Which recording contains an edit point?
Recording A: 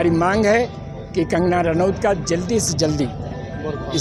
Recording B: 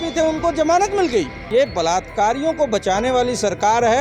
B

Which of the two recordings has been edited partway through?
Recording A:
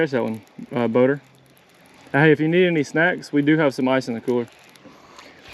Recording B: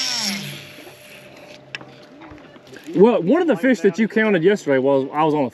B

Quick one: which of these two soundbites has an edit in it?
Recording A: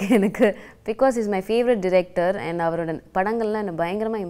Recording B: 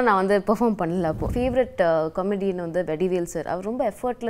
B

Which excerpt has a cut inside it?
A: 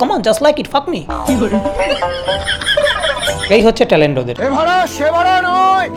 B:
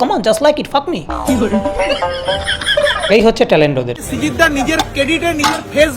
B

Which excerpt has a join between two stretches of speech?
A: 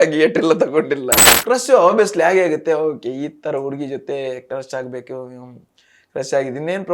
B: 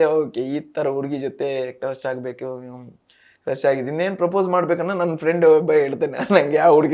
A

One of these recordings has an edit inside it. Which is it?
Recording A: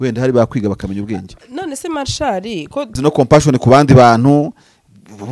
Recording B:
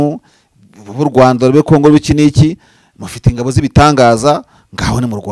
A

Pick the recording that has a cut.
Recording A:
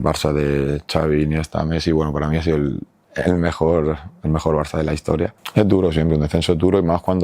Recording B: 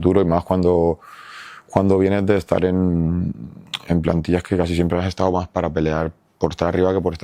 A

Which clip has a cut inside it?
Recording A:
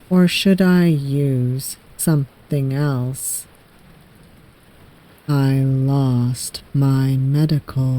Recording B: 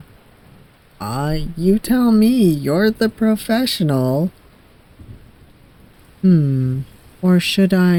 A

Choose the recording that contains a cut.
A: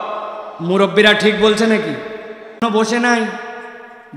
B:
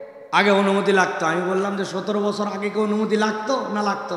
A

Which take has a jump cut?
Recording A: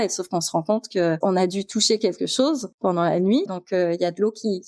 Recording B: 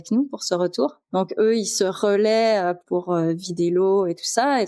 A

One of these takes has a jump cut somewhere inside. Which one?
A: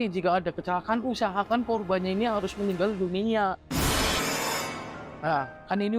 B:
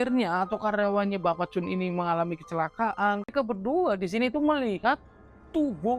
B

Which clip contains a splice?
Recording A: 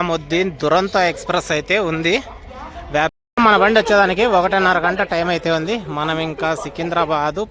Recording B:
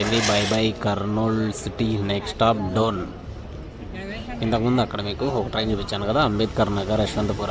A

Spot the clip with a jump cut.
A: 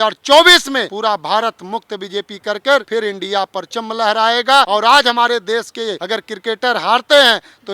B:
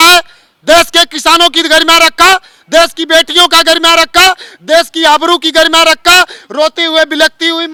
A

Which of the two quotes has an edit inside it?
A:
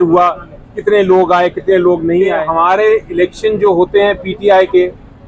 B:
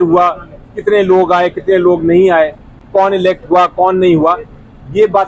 A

